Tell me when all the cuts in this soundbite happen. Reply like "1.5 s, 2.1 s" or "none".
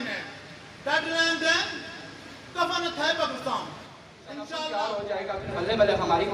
4.4 s